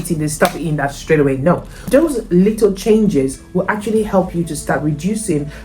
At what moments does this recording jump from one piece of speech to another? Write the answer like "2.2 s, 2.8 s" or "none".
1.8 s